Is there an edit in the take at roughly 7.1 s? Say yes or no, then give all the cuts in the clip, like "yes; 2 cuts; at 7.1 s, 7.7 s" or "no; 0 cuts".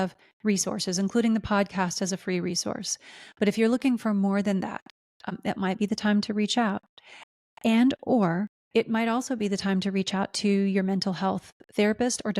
no; 2 cuts; at 5.3 s, 8.6 s